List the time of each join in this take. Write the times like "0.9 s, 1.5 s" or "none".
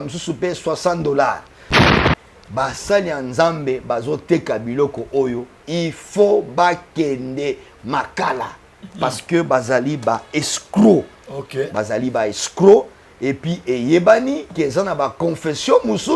1.8 s